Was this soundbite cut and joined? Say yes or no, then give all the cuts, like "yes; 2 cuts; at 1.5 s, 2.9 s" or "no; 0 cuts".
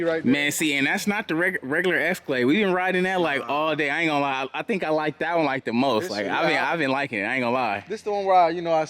no; 0 cuts